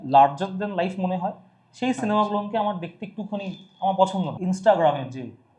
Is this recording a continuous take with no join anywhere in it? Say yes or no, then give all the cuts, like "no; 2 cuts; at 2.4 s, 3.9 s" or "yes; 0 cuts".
no; 1 cut; at 4.3 s